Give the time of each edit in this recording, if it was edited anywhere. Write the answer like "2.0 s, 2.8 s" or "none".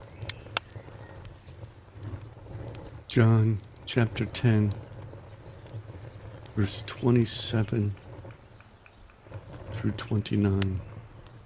3.1 s